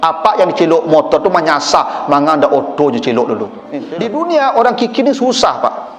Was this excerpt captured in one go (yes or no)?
no